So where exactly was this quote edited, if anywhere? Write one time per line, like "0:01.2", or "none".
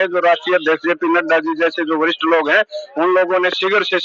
none